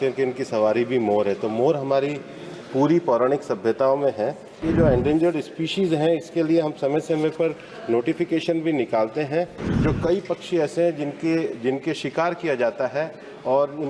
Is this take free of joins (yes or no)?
no